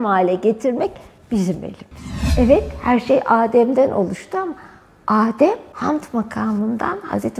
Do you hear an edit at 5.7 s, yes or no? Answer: yes